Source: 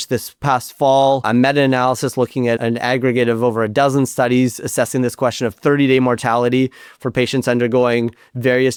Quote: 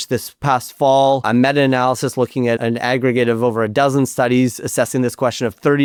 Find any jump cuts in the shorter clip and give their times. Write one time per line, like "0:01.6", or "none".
none

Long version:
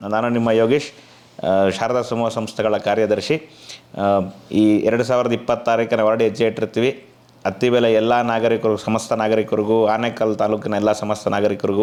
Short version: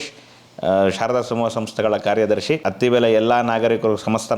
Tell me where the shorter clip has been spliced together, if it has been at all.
0:02.7

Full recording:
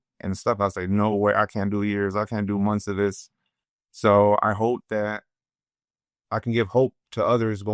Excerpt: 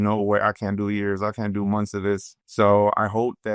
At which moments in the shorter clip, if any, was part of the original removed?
0:02.4

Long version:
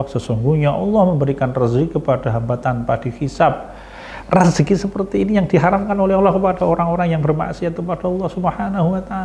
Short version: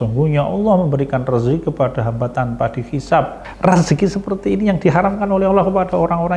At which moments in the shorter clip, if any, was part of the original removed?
0:03.4

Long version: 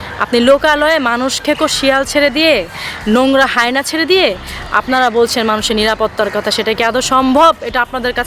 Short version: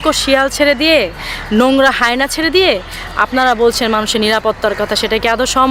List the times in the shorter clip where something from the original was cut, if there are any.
none

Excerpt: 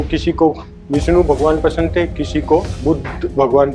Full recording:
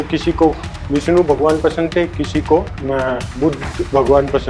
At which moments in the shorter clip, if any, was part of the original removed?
0:02.7

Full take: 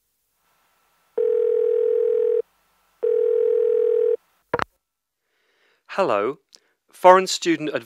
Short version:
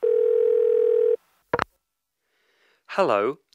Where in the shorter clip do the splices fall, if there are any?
0:01.0

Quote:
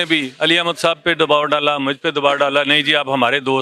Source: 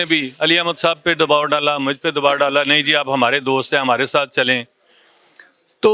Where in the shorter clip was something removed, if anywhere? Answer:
none

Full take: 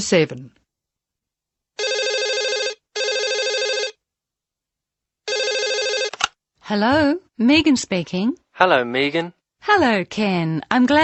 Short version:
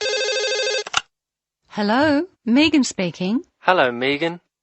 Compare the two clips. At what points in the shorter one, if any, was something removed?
0:01.2

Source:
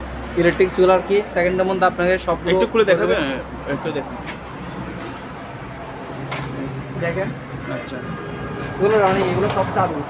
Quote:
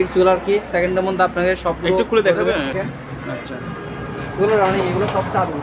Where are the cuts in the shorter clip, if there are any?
0:02.7

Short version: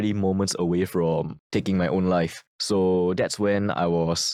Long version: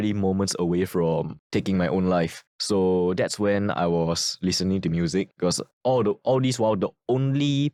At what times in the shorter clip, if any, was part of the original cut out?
none

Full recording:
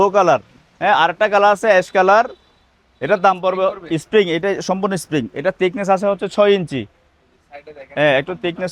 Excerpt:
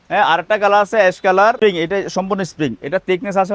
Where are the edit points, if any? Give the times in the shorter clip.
0:01.6

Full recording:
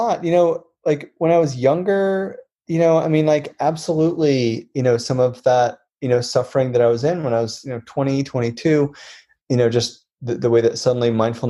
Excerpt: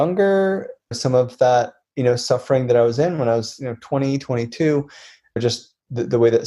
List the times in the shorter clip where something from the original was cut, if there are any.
0:01.0
0:05.4

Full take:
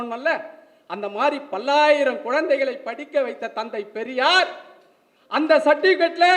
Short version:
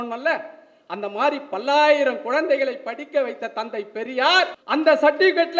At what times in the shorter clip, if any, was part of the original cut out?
0:04.6

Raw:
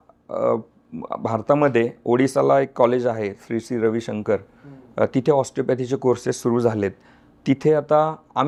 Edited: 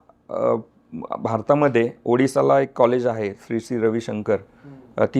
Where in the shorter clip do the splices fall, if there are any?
none

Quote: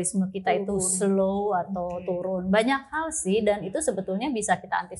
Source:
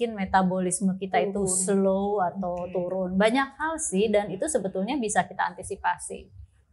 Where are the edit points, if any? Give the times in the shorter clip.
none

